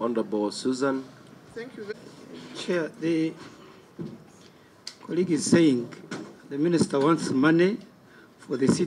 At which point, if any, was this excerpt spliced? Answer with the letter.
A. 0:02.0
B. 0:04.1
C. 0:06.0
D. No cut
A